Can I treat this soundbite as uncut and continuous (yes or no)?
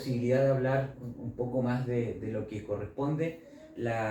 yes